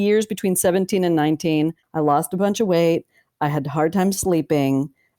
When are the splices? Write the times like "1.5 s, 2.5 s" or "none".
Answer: 1.8 s